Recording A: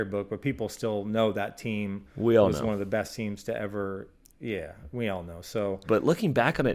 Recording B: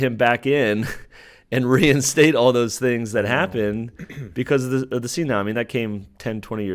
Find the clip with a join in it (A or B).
A